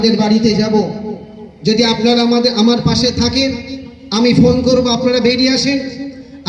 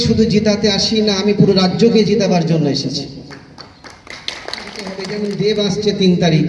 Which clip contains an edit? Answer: second; 1 cut; at 5.0 s

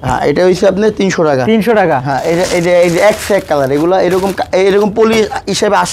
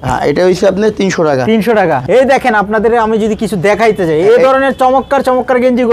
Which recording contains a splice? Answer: second; 1 cut; at 2.0 s

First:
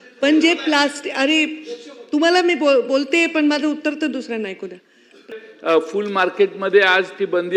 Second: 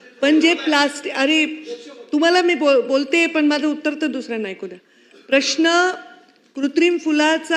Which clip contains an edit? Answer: first; 1 cut; at 5.3 s

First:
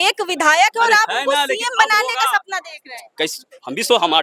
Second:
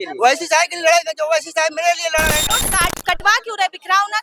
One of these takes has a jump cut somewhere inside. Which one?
second; 1 cut; at 2.5 s

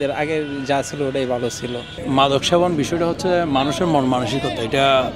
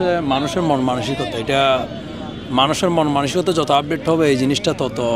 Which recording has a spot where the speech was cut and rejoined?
first; 1 cut; at 1.9 s

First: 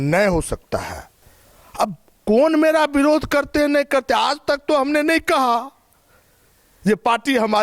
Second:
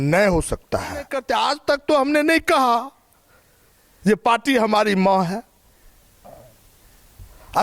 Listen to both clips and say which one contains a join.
second; 1 cut; at 1.2 s

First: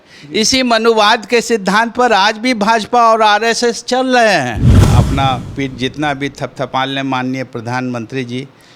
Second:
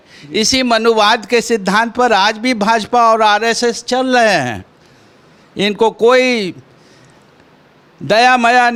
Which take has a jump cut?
first; 1 cut; at 4.9 s

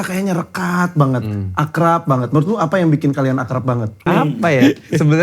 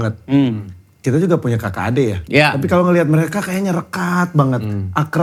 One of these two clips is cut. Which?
first; 1 cut; at 4.1 s

